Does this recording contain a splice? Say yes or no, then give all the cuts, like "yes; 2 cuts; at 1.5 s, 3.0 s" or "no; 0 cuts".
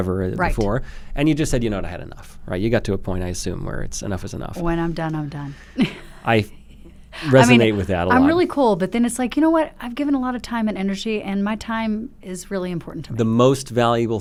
no; 0 cuts